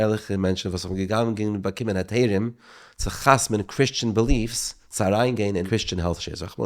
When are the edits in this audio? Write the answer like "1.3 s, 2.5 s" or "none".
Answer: 5.6 s